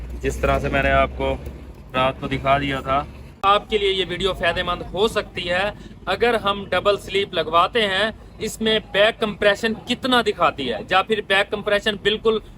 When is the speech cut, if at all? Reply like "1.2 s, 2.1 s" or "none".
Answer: 3.3 s

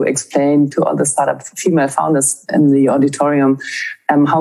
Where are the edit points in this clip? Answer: 0.7 s, 2.5 s

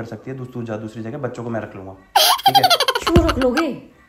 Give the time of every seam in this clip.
none

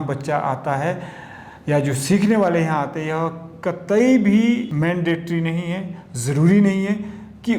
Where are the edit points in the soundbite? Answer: 4.7 s

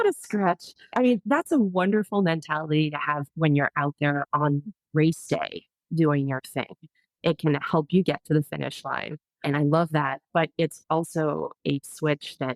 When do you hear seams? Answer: 0.9 s, 9.5 s

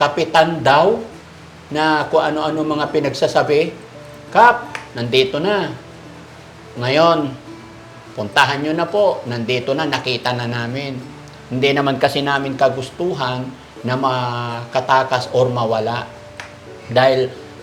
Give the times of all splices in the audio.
none

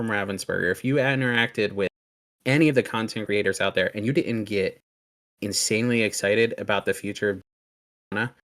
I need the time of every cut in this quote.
3.2 s

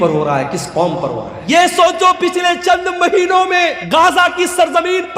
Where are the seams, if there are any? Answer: 1.3 s, 3.8 s

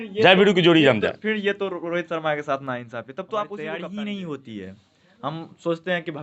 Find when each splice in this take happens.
3.7 s

